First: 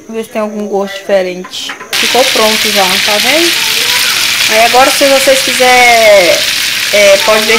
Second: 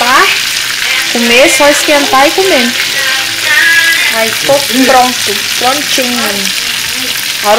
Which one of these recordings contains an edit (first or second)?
first